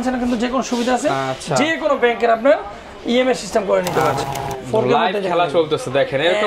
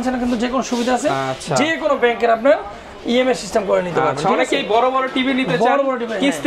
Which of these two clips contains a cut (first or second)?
first